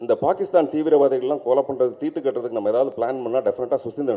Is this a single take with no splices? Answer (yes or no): yes